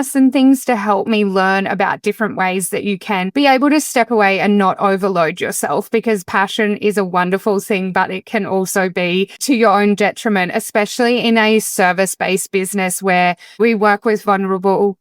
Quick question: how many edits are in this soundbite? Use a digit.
1